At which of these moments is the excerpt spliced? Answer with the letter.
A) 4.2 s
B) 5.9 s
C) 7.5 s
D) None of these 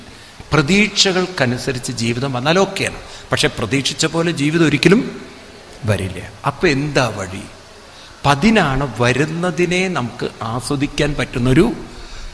D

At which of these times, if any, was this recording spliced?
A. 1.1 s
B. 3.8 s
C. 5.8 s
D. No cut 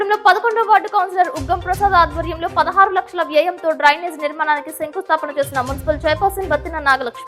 D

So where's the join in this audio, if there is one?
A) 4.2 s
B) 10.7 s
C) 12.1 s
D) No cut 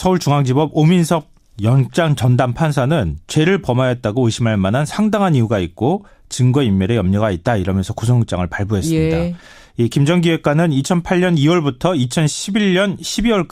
C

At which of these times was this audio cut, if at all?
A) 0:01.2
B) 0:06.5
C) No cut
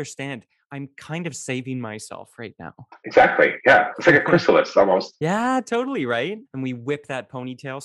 B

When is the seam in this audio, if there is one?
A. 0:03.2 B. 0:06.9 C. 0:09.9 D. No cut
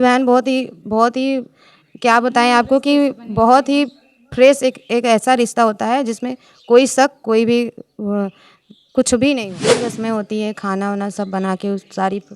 C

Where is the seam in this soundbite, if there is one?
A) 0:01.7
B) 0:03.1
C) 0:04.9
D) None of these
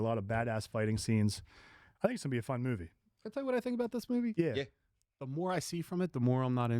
D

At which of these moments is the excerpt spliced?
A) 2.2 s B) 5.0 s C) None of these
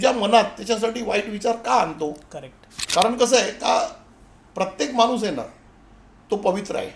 C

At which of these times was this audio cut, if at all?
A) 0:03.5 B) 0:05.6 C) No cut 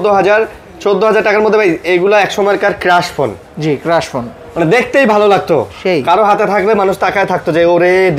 C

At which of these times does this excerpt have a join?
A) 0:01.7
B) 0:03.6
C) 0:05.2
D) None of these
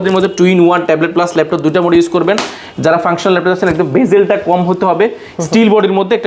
D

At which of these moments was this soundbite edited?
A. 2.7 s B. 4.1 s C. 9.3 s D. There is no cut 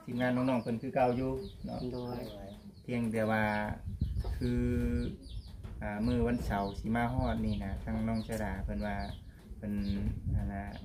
D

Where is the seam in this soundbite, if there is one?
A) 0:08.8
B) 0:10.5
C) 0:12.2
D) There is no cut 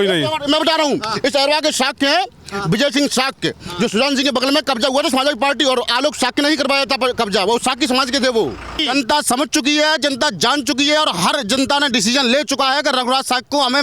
A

